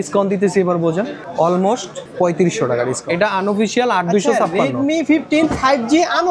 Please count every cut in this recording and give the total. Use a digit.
3